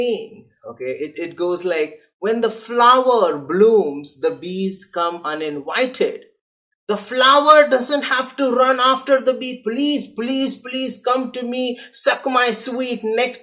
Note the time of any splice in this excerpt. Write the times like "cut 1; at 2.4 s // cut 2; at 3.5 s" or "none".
none